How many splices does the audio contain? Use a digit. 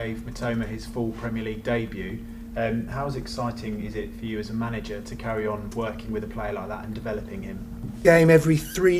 1